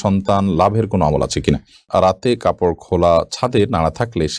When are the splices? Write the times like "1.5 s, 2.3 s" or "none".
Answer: 1.8 s